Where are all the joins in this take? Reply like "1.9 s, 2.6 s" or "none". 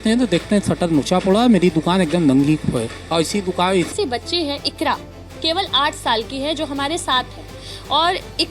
3.9 s

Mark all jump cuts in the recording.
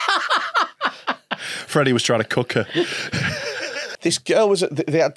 3.9 s

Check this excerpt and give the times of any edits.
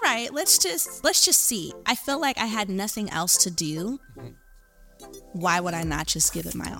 none

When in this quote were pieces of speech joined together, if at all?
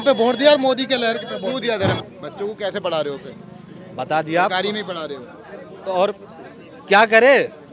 2.1 s

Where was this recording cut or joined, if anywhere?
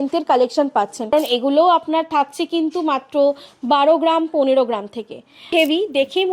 1.1 s, 5.5 s

